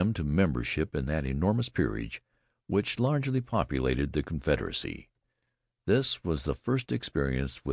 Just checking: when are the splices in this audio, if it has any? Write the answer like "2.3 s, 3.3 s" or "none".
4.6 s